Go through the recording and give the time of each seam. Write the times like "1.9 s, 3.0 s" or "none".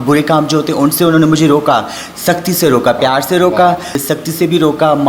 4.0 s